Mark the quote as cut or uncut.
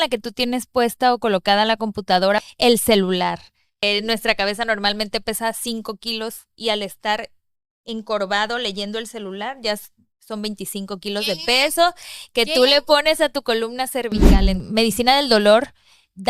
cut